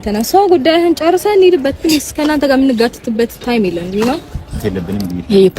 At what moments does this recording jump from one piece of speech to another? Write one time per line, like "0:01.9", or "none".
0:04.6